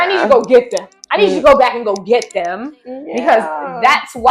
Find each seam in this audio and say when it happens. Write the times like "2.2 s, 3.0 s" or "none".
none